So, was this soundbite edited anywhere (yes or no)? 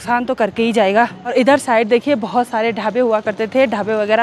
no